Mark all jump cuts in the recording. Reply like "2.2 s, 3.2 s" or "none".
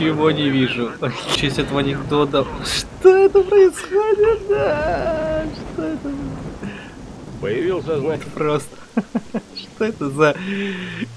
1.4 s, 8.2 s